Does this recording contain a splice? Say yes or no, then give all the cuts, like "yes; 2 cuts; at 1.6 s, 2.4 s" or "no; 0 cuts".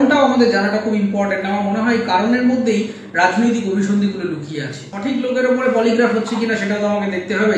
yes; 1 cut; at 4.9 s